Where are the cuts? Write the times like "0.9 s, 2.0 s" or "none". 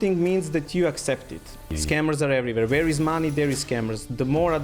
1.7 s